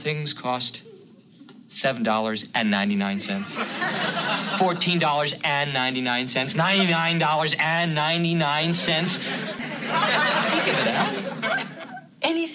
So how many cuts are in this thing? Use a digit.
1